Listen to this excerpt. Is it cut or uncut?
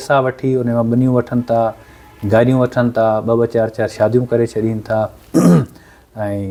uncut